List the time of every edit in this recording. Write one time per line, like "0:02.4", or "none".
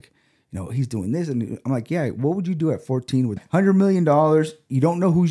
0:03.4